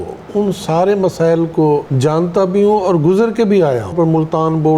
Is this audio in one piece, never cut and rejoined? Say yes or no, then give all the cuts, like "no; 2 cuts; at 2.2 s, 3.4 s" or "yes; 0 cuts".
no; 2 cuts; at 1.9 s, 3.9 s